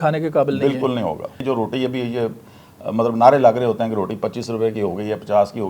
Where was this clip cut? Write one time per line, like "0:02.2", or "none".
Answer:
0:01.4